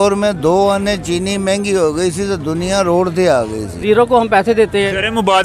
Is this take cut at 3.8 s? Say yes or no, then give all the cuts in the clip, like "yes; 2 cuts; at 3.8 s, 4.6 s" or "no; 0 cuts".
yes; 1 cut; at 3.8 s